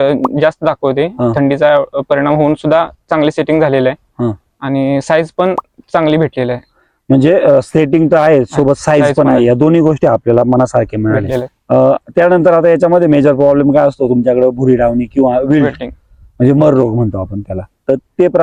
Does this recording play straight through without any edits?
yes; 0 cuts

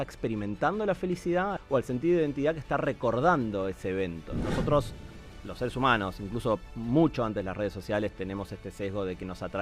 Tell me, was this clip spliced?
yes; 2 cuts; at 1.6 s, 4.3 s

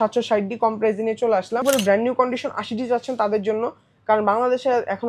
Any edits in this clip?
yes; 1 cut; at 1.6 s

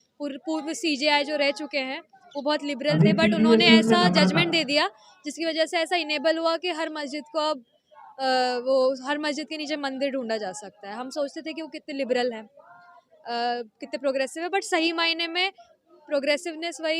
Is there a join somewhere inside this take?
no; 0 cuts

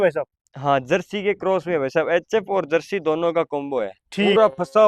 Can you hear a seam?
no; 0 cuts

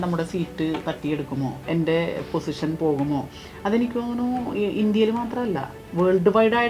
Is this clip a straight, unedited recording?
yes; 0 cuts

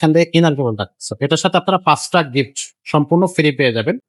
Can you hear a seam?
no; 0 cuts

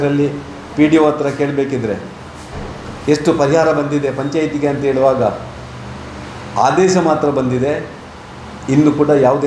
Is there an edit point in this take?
no; 0 cuts

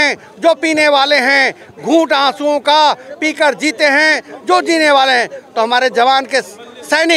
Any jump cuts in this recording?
no; 0 cuts

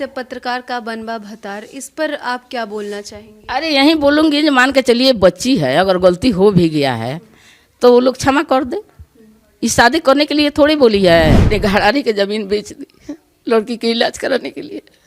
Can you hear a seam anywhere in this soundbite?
yes; 1 cut; at 11.5 s

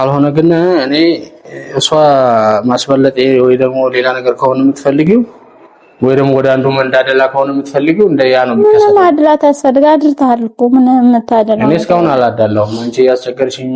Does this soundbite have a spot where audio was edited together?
no; 0 cuts

